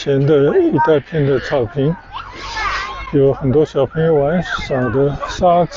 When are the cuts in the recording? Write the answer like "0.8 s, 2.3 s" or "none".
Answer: none

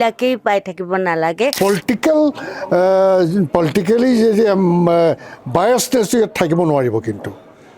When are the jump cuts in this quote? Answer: 1.5 s

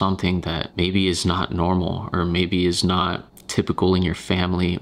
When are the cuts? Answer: none

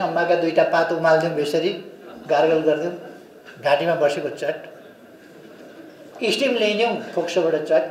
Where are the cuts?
none

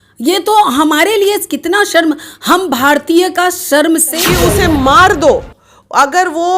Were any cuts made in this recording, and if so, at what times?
4.1 s

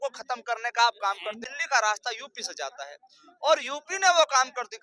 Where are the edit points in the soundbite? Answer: 1.3 s

